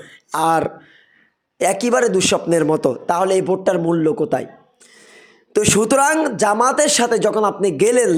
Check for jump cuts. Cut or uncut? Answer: uncut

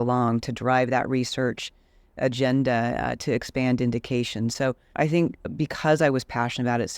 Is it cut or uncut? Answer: uncut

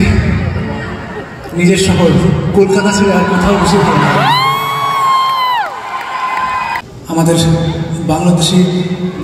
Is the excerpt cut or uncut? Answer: cut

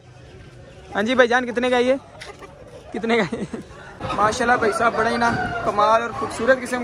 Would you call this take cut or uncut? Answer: cut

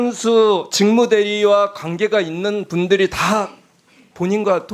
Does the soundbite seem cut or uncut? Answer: uncut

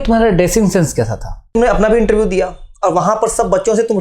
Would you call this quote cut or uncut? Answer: cut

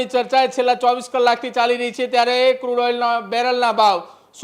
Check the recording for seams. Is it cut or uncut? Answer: uncut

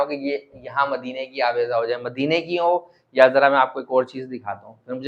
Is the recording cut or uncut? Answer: uncut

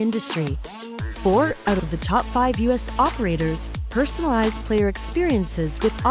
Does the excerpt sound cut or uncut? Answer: uncut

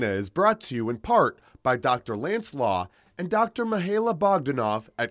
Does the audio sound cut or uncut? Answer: uncut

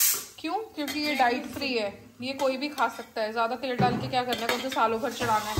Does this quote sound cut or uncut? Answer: uncut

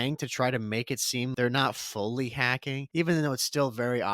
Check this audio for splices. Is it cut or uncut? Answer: cut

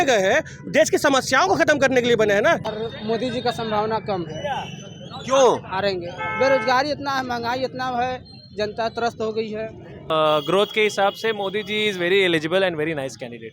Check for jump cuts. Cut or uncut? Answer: cut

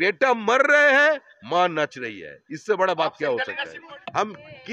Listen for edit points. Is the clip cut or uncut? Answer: cut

